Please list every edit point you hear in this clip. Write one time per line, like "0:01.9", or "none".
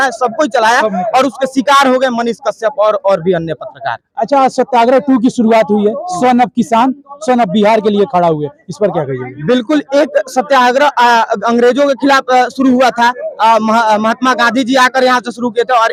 none